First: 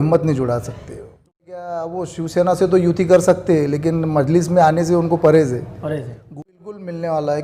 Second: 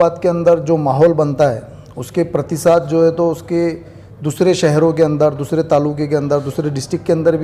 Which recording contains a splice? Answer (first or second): first